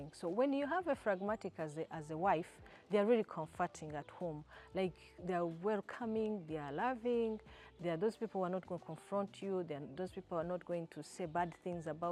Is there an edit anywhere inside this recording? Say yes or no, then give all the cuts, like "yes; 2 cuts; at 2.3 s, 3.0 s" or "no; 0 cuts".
no; 0 cuts